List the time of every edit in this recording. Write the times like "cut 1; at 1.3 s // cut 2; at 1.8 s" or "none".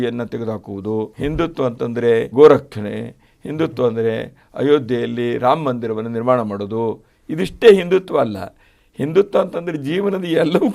cut 1; at 1.1 s // cut 2; at 2.3 s